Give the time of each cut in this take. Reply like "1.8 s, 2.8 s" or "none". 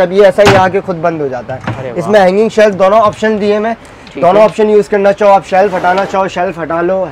none